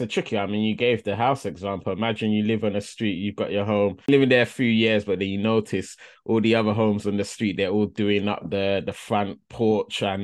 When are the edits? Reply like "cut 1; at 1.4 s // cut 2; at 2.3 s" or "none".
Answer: cut 1; at 4.1 s